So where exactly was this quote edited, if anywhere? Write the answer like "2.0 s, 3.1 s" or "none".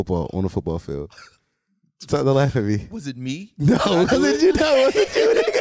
none